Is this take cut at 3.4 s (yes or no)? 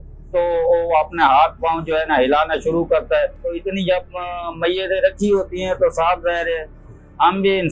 yes